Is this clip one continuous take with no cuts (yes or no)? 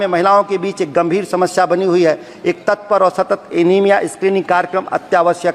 yes